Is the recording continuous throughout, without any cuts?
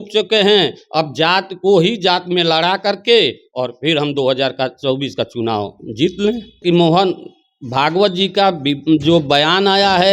no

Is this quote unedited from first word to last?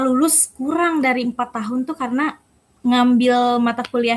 yes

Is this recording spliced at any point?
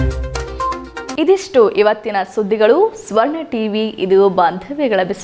no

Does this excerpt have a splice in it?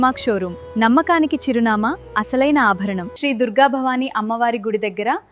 yes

